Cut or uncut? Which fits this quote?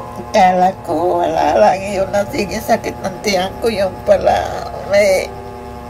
uncut